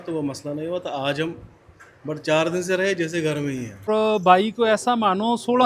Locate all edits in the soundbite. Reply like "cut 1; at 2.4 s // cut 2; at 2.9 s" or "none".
cut 1; at 3.9 s